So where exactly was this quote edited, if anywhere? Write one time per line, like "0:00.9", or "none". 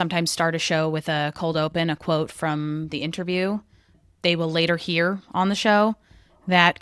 none